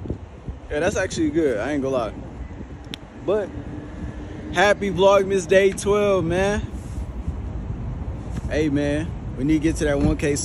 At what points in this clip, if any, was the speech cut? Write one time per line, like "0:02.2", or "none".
none